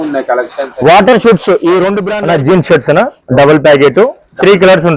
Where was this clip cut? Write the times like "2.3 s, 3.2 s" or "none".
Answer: 2.1 s

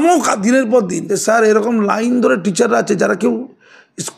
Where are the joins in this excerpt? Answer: 1.0 s

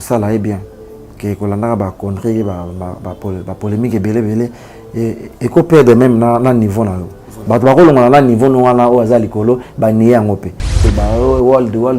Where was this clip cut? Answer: 10.8 s

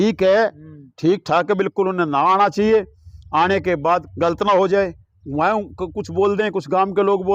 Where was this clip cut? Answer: 4.0 s

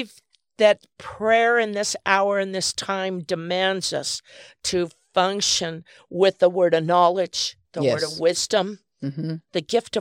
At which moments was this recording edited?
none

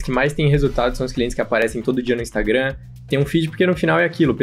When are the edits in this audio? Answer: none

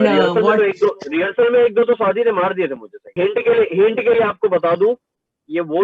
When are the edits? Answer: 3.1 s

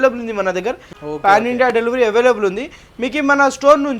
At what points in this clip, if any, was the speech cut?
0.9 s

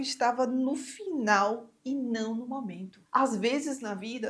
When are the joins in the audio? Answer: 2.9 s

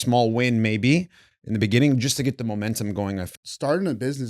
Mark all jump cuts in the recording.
3.3 s

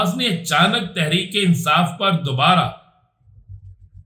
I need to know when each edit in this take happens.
none

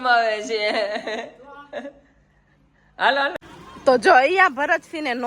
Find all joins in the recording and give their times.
3.3 s

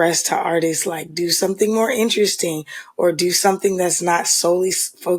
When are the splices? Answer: none

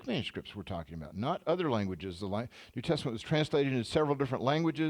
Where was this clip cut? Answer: none

